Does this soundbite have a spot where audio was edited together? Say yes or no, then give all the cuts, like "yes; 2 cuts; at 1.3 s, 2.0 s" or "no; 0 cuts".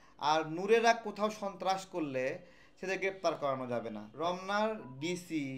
yes; 1 cut; at 4.0 s